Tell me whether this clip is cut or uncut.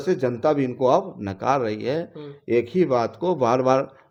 uncut